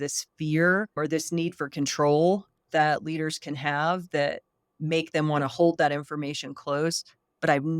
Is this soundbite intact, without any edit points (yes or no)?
no